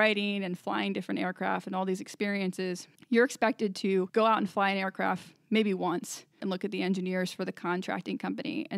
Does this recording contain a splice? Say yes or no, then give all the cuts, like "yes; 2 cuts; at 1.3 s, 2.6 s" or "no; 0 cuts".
yes; 3 cuts; at 2.9 s, 4.1 s, 6.4 s